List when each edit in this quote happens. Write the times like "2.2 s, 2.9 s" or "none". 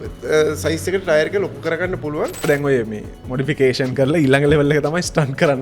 2.4 s